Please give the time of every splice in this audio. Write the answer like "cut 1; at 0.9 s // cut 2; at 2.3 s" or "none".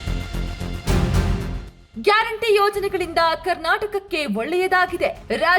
none

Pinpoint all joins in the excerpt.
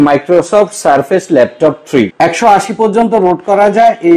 cut 1; at 2.1 s

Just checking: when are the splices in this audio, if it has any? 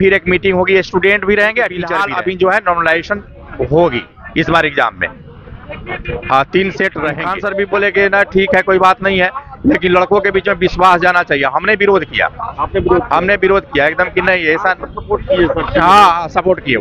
cut 1; at 1.9 s // cut 2; at 7.3 s

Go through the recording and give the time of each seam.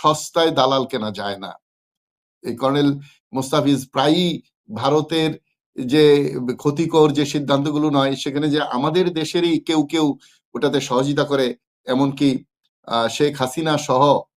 none

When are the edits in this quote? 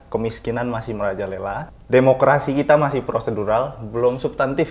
cut 1; at 1.7 s

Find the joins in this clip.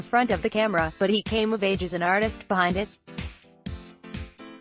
cut 1; at 3.6 s

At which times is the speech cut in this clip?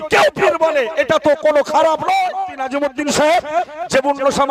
cut 1; at 2.5 s

